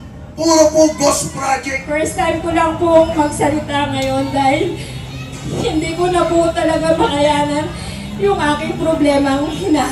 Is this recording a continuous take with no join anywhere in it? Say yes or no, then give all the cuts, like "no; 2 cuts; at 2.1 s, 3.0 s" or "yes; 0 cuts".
no; 1 cut; at 1.8 s